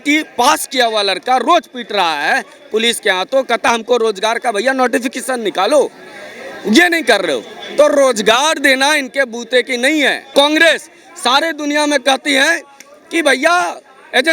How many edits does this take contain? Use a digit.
1